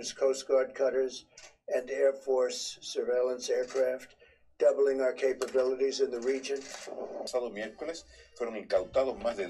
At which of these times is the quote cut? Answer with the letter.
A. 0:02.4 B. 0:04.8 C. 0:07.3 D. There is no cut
C